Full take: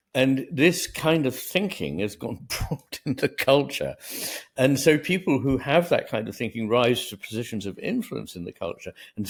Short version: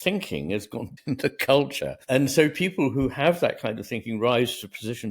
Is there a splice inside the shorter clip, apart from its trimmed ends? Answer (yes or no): yes